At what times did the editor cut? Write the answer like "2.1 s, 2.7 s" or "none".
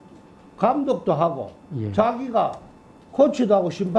none